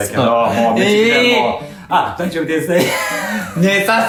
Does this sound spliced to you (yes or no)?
no